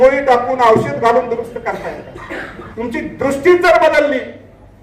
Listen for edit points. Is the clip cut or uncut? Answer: cut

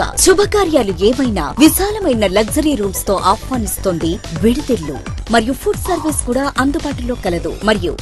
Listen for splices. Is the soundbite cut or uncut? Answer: uncut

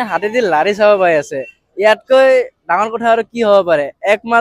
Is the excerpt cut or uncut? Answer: uncut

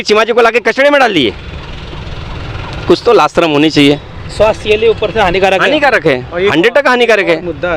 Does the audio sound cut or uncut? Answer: uncut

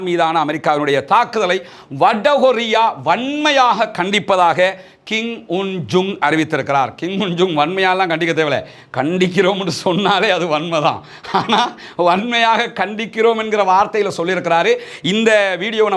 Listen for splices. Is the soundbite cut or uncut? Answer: uncut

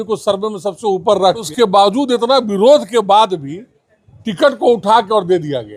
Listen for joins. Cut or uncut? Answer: cut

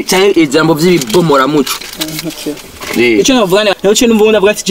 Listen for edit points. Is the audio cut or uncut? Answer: cut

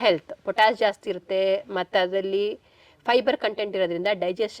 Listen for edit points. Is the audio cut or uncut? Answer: uncut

